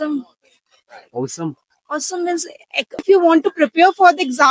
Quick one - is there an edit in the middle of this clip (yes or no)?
yes